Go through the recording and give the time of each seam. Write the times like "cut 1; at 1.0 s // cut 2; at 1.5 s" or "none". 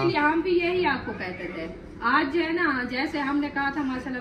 none